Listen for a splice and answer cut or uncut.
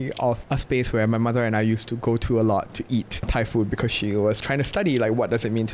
uncut